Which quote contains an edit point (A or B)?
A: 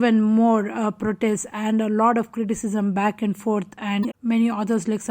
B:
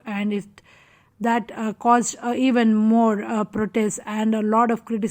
A